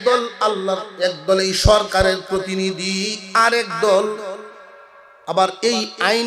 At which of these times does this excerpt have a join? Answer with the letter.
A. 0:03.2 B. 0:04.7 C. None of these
C